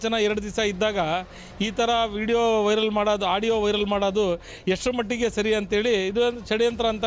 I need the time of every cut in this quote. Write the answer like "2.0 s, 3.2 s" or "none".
none